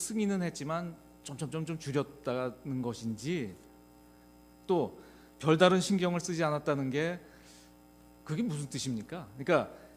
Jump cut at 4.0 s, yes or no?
no